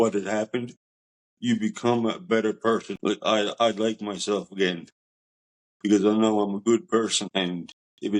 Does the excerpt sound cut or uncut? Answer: uncut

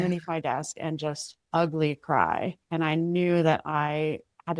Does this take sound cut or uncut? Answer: uncut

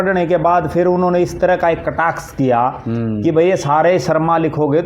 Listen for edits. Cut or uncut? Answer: uncut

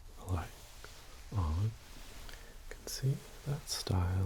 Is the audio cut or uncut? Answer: uncut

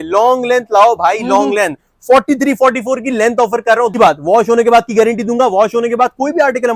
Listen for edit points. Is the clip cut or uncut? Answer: cut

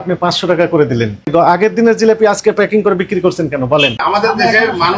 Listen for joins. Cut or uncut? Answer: cut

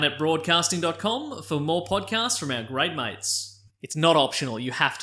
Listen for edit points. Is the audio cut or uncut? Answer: uncut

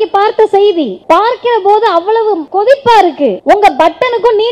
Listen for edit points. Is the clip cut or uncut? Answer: cut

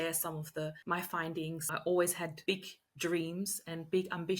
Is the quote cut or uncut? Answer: cut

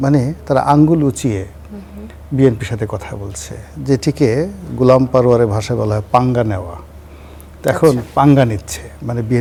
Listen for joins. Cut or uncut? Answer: uncut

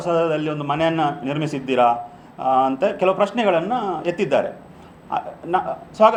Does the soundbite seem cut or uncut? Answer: uncut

